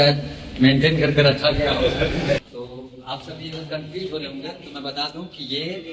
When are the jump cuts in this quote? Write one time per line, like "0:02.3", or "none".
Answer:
0:02.4